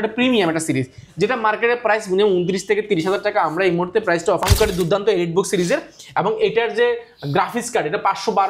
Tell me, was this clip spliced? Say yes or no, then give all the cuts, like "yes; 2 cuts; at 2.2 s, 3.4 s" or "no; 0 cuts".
yes; 1 cut; at 4.4 s